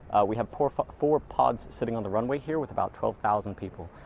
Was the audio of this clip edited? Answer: no; 0 cuts

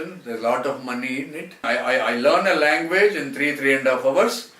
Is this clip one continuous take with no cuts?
no; 1 cut; at 1.6 s

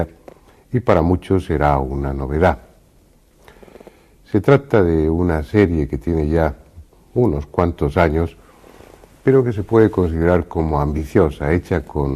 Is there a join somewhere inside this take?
no; 0 cuts

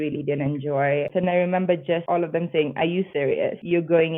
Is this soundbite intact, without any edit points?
no; 3 cuts; at 1.1 s, 2.0 s, 3.3 s

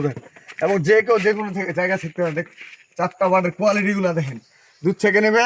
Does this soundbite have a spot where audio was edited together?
no; 0 cuts

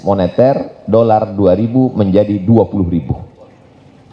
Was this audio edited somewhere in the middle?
no; 0 cuts

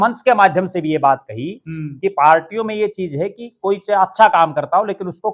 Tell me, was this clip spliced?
no; 0 cuts

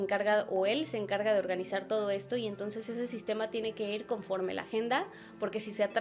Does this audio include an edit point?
no; 0 cuts

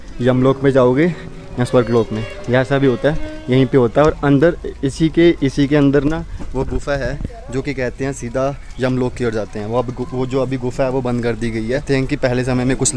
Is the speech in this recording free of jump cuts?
no; 1 cut; at 11.8 s

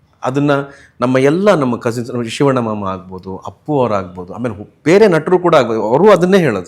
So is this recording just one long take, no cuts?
yes; 0 cuts

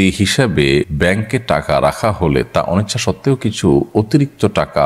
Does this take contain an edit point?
yes; 1 cut; at 0.9 s

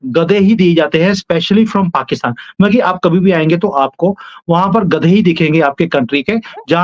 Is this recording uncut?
yes; 0 cuts

